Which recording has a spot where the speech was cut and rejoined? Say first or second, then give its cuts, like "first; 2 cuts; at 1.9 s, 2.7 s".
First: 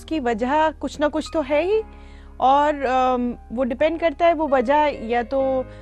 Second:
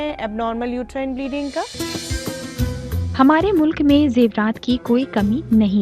second; 2 cuts; at 1.7 s, 3.1 s